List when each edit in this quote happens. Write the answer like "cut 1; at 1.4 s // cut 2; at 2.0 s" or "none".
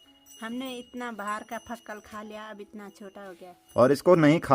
cut 1; at 3.5 s